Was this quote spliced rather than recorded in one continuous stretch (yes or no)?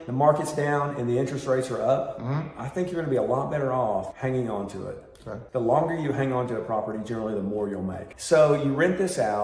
no